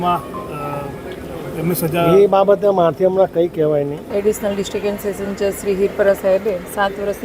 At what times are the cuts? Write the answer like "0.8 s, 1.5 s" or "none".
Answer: 4.0 s